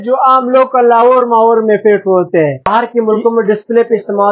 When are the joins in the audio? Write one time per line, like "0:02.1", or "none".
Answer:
0:02.7